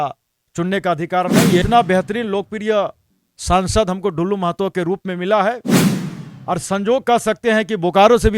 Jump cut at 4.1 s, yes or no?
no